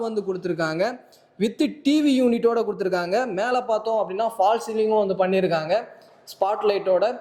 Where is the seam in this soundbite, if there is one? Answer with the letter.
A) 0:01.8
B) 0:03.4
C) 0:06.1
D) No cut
D